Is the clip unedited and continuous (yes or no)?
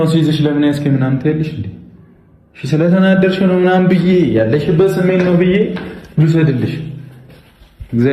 yes